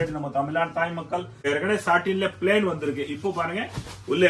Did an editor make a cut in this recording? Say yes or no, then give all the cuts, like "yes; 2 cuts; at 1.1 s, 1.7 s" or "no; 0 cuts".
yes; 1 cut; at 1.5 s